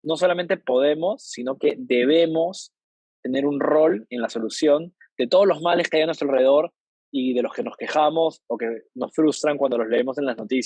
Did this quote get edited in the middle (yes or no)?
no